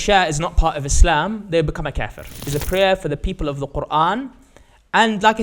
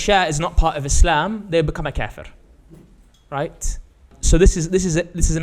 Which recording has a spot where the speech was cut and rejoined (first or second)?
first